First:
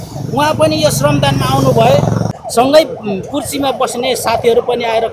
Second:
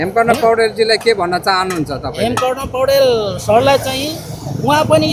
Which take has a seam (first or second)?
first